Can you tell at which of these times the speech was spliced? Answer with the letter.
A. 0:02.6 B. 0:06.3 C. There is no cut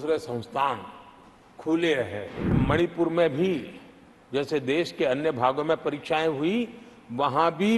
A